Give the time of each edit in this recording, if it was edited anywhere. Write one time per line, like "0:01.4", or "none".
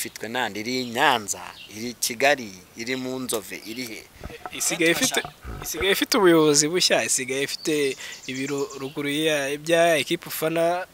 none